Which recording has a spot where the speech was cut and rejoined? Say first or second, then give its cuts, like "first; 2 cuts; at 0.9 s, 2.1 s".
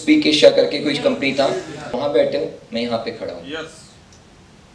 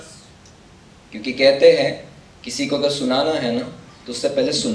first; 1 cut; at 1.9 s